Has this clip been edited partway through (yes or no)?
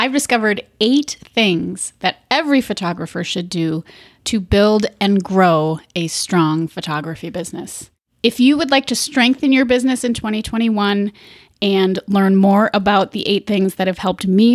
no